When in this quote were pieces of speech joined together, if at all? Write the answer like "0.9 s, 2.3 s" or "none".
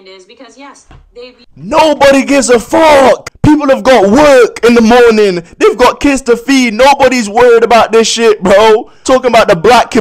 1.4 s, 3.3 s, 8.9 s